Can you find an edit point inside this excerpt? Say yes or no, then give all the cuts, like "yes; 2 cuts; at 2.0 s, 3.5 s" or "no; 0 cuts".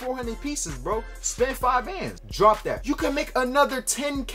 yes; 2 cuts; at 2.2 s, 2.8 s